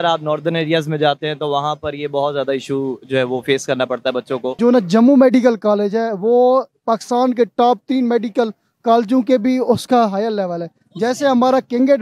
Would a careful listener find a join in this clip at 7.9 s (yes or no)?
no